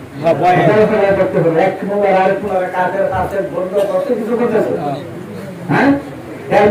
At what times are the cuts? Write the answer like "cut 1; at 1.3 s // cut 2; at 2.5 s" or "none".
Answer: none